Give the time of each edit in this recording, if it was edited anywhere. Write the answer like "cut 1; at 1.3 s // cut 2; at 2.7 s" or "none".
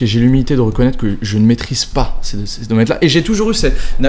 none